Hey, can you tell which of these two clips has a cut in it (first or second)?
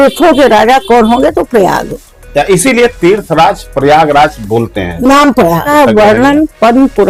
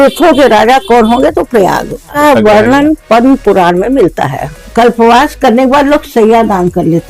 second